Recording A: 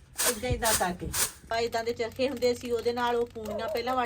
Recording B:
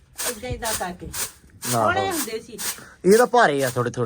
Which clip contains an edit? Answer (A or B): A